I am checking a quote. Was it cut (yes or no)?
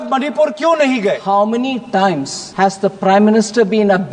yes